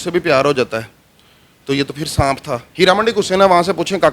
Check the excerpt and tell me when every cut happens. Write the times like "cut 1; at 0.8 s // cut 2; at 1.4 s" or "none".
cut 1; at 2.7 s